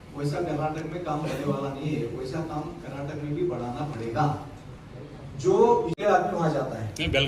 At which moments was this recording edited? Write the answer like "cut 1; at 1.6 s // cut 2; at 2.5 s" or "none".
cut 1; at 6.0 s